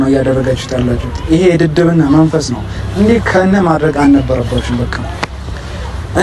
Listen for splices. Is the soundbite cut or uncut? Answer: uncut